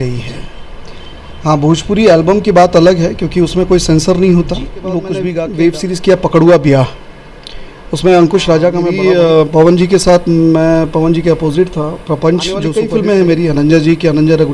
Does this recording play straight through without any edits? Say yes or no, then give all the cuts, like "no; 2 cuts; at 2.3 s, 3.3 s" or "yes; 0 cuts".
no; 3 cuts; at 5.3 s, 8.9 s, 12.7 s